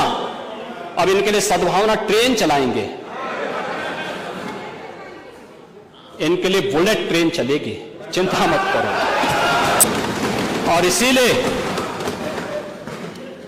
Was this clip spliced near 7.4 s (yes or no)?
no